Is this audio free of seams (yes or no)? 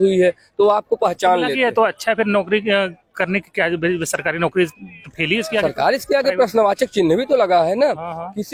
yes